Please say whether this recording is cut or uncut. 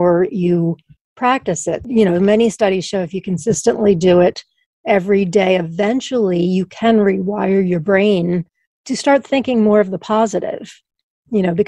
cut